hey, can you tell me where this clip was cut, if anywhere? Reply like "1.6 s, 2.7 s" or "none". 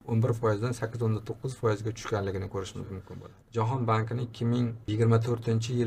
3.4 s